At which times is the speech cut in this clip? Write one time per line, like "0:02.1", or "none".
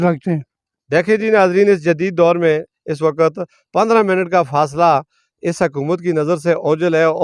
none